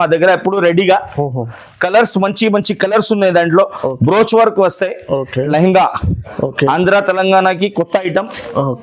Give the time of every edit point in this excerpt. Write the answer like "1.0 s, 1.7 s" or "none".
5.5 s